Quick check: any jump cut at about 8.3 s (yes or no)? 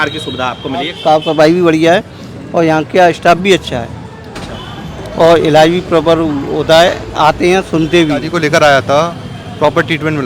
yes